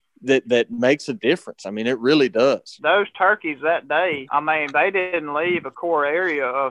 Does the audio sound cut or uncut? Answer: cut